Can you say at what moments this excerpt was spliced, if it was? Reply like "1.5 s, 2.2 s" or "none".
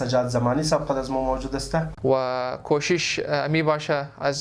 1.9 s